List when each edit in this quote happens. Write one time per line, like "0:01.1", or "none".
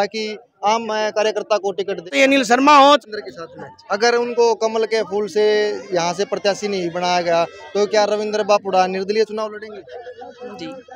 0:02.1
0:03.1